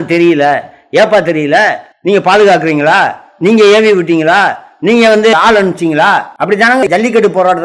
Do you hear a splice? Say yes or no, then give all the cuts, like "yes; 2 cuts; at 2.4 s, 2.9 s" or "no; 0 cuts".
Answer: yes; 2 cuts; at 1.9 s, 6.8 s